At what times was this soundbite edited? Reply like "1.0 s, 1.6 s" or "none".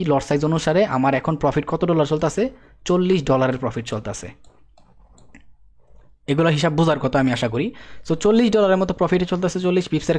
none